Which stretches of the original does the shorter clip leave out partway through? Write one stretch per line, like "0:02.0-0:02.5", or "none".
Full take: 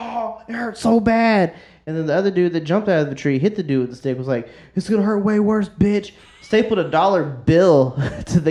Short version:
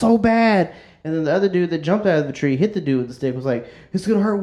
none